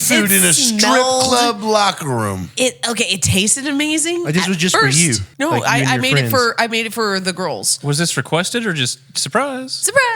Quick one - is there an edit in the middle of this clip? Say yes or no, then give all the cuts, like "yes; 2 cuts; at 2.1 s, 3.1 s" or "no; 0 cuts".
yes; 1 cut; at 5.3 s